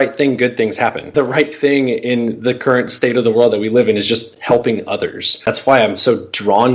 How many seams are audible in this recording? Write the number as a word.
two